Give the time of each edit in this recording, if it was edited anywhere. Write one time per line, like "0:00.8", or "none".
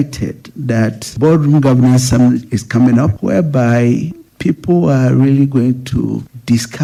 none

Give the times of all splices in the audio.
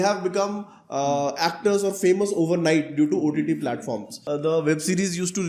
0:04.1

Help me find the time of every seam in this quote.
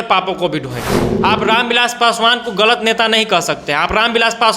0:01.0

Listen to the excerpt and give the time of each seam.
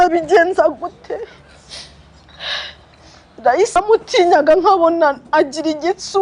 0:03.8

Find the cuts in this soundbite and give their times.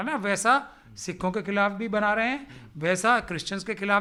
none

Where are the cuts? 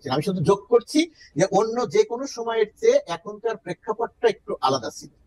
none

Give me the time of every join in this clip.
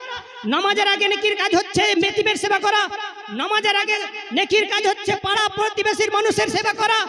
none

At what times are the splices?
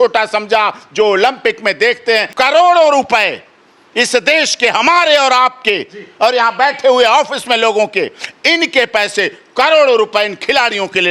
0:02.3

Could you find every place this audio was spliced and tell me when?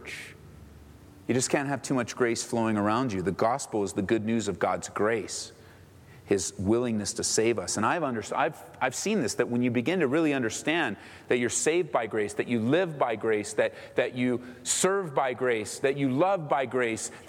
none

